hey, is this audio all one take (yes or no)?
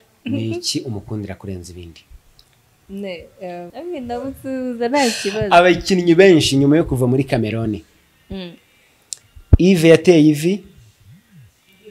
no